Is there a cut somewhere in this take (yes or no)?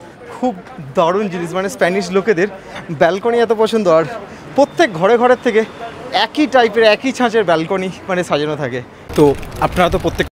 no